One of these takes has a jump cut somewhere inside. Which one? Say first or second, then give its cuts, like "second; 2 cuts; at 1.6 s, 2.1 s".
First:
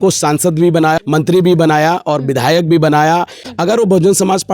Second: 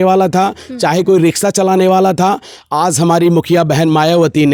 first; 2 cuts; at 1.0 s, 3.4 s